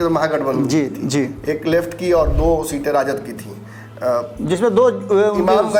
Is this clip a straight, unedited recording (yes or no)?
yes